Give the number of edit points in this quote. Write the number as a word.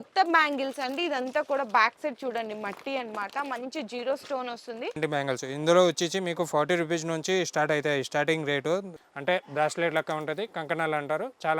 two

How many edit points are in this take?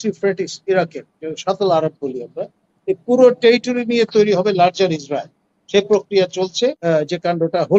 one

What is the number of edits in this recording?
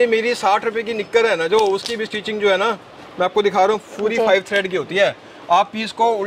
zero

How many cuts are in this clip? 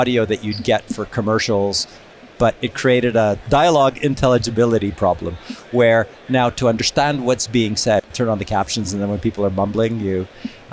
two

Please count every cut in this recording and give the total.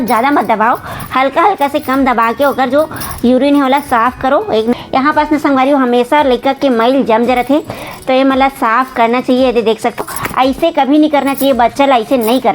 two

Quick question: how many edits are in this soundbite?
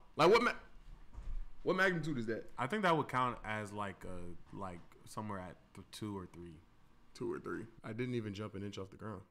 one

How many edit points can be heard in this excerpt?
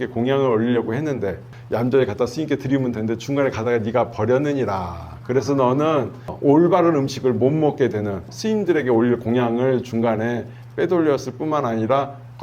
three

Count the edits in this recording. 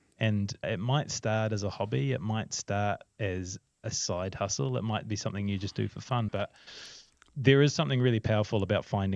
one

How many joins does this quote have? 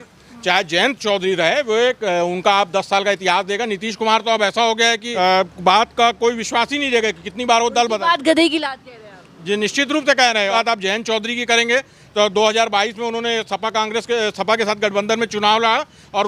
two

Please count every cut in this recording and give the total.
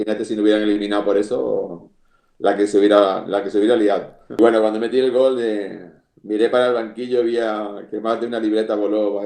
one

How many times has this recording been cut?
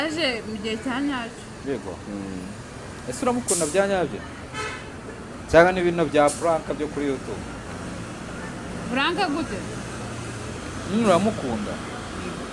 zero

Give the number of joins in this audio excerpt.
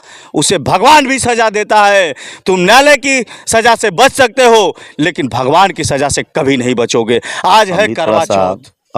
one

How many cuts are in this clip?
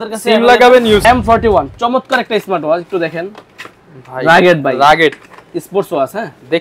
one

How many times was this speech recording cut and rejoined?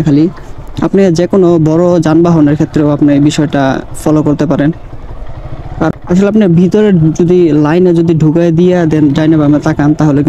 one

